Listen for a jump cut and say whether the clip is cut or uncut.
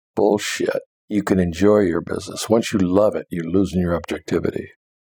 cut